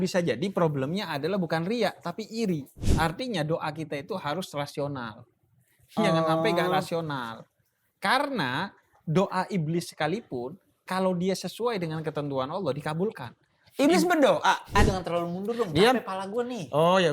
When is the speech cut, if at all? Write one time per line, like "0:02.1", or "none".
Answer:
0:02.8
0:14.8

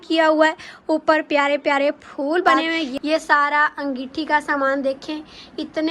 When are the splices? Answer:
0:02.9

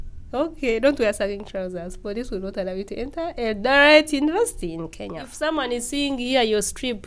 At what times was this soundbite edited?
0:05.3

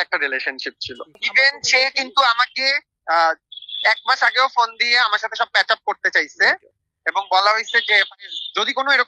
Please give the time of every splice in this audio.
none

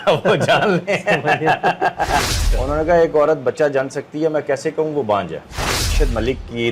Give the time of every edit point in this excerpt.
0:02.3
0:05.9

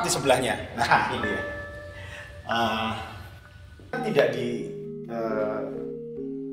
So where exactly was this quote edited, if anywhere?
0:04.0

